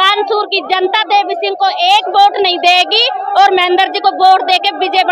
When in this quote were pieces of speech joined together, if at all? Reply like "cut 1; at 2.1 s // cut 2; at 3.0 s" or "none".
none

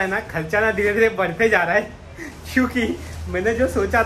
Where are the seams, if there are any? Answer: none

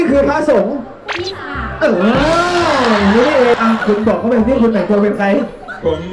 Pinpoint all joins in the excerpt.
cut 1; at 3.5 s

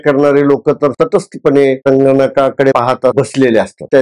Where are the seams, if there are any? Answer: cut 1; at 0.9 s // cut 2; at 2.8 s

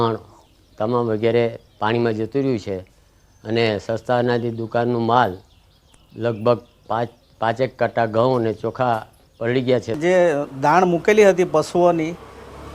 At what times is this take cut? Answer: cut 1; at 7.2 s

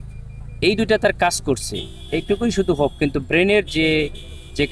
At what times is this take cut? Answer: none

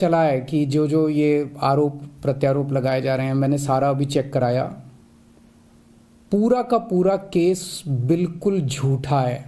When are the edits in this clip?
none

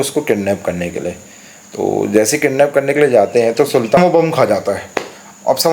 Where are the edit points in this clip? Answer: cut 1; at 4.0 s

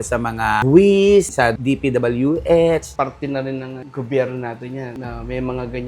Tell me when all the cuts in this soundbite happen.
cut 1; at 1.3 s // cut 2; at 2.9 s

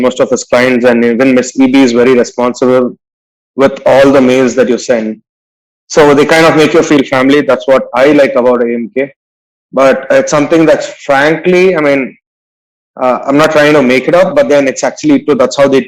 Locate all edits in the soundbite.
none

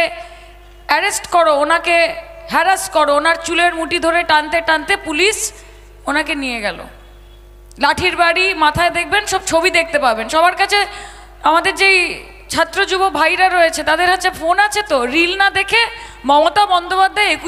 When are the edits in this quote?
none

